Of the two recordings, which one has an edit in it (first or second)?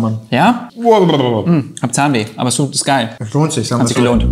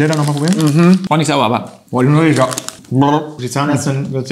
second